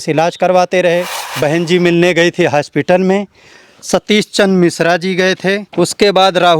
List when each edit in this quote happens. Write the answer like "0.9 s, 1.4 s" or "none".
1.2 s, 5.7 s